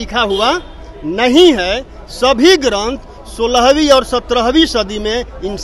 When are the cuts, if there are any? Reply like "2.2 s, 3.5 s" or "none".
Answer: none